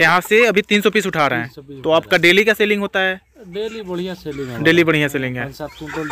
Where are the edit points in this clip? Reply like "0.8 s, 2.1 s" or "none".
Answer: none